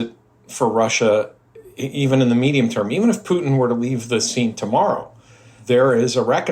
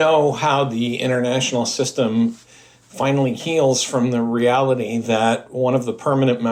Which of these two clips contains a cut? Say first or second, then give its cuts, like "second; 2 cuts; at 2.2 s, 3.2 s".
first; 1 cut; at 5.5 s